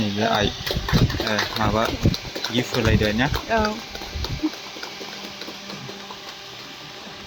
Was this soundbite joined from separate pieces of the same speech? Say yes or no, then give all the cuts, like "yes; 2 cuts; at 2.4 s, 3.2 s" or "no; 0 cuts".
no; 0 cuts